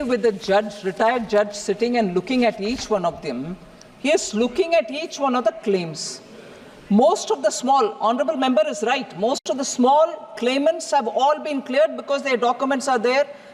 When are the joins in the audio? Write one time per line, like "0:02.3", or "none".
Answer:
none